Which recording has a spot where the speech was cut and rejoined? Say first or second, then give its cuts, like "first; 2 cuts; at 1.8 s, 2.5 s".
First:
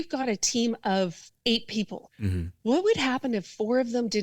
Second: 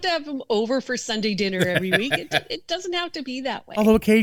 first; 2 cuts; at 1.3 s, 2.0 s